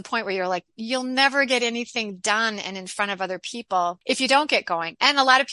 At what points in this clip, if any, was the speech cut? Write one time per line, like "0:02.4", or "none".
0:04.0